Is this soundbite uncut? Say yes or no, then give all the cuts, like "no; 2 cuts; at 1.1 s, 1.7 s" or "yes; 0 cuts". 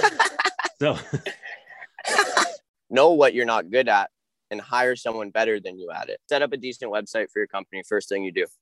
no; 2 cuts; at 2.6 s, 6.2 s